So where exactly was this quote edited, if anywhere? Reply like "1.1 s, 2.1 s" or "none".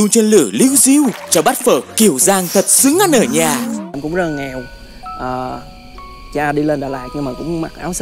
3.9 s